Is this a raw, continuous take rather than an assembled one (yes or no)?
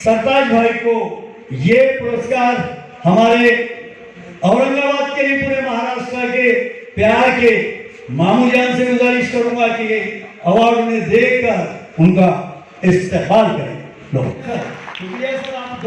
no